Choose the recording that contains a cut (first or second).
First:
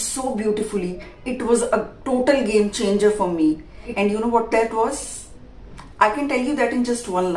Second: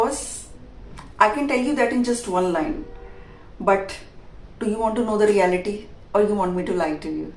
first